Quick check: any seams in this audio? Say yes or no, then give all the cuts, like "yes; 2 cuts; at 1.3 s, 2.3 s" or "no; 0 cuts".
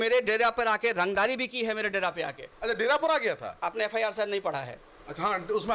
no; 0 cuts